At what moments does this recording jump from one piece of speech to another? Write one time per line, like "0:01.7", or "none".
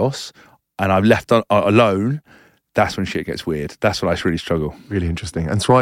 none

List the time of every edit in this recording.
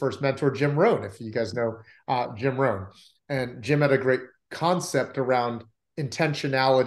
none

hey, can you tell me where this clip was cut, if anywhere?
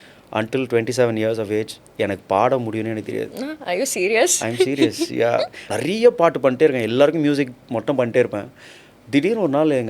0:05.6

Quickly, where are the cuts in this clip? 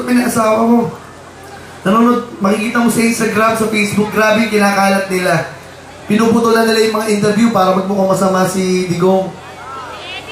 0:01.8

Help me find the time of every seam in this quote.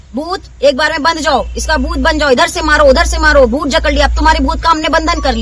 none

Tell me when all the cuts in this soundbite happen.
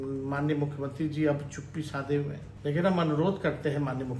0:02.4

